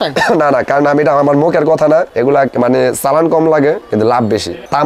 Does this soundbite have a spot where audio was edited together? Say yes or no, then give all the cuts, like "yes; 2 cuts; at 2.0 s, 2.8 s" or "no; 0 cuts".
yes; 2 cuts; at 2.1 s, 4.0 s